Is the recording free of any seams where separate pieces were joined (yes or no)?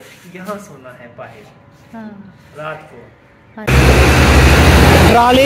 no